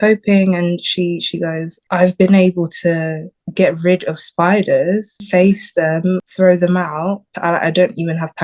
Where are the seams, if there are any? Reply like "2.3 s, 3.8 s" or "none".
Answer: 1.8 s, 5.2 s, 6.2 s, 7.3 s